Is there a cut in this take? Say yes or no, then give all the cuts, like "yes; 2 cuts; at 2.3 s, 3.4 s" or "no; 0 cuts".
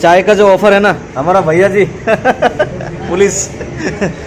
no; 0 cuts